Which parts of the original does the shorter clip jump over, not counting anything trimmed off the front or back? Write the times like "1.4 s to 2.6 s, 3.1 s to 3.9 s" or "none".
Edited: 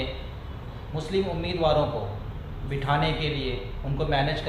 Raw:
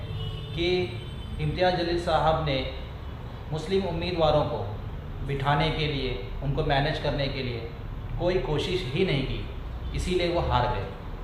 none